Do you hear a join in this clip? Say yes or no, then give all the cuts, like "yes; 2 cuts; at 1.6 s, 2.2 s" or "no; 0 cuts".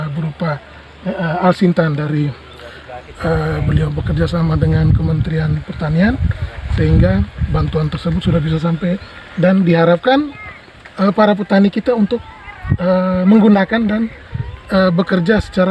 no; 0 cuts